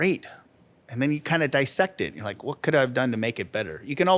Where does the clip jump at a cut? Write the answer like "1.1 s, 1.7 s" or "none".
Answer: none